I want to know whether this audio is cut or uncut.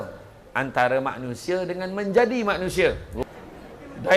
cut